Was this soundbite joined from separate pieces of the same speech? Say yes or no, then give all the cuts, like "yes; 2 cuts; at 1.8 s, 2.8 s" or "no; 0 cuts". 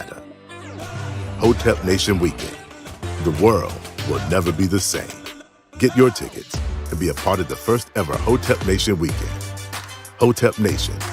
yes; 1 cut; at 4.5 s